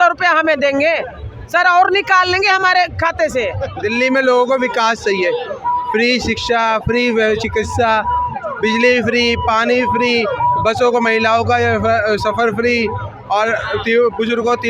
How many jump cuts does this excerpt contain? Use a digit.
1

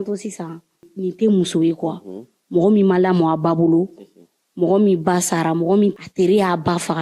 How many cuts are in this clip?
2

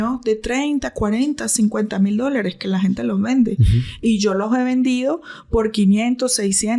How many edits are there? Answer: 0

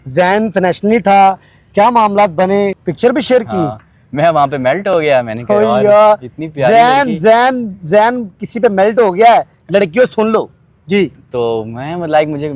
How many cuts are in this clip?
1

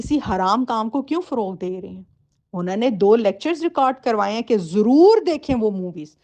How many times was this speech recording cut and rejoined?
0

